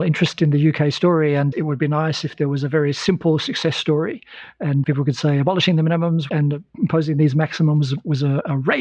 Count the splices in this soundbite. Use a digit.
3